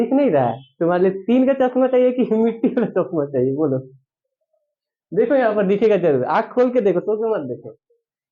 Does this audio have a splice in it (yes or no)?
no